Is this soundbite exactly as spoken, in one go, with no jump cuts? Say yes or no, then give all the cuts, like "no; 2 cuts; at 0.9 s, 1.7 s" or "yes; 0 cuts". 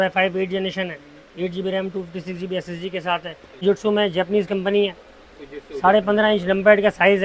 no; 1 cut; at 3.4 s